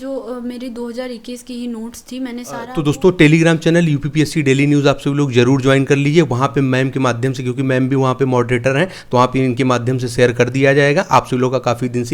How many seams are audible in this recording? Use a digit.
1